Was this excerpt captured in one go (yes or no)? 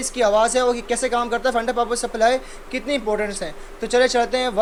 yes